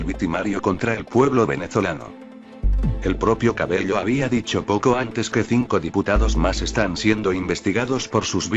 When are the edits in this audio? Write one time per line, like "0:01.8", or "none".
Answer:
0:02.5